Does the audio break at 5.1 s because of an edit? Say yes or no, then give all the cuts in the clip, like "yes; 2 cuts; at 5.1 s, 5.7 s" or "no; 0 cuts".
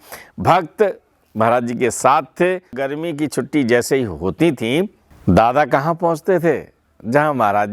yes; 2 cuts; at 2.8 s, 5.1 s